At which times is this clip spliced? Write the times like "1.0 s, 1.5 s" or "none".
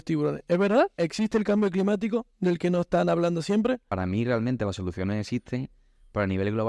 0.9 s, 3.9 s